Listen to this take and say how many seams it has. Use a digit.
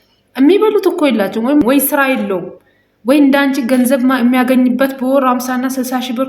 1